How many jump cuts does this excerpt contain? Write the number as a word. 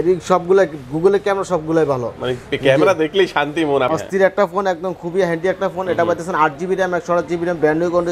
one